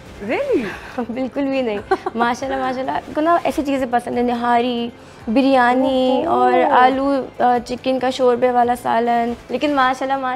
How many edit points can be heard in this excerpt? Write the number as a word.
two